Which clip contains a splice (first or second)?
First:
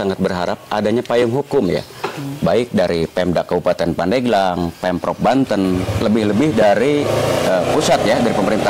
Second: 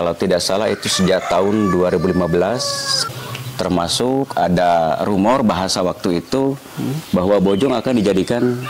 second